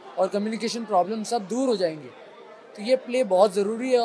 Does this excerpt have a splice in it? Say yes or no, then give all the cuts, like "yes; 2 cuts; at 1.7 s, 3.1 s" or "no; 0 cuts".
no; 0 cuts